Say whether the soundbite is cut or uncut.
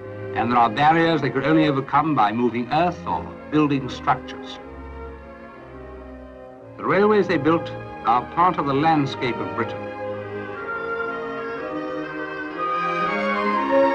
cut